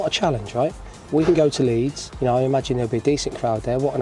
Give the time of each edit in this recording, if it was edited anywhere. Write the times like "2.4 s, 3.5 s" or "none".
2.0 s